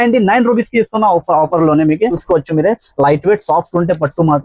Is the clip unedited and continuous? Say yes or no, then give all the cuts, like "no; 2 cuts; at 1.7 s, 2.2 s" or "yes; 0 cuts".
no; 1 cut; at 2.2 s